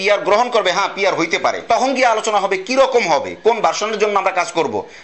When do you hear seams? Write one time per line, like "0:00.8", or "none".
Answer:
none